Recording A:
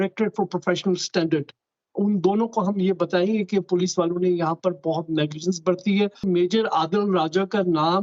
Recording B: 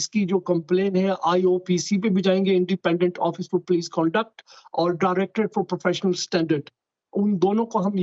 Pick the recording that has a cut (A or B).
A